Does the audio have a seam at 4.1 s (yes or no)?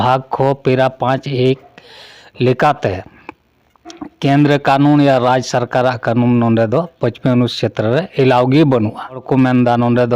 no